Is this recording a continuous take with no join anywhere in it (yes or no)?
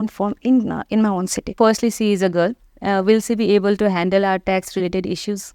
no